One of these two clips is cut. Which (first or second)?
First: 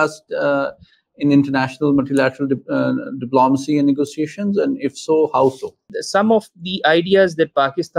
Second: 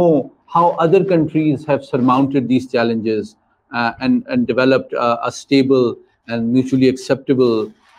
first